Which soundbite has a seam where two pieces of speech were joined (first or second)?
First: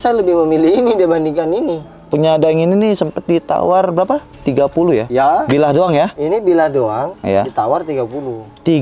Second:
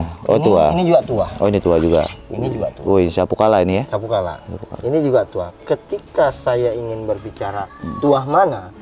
first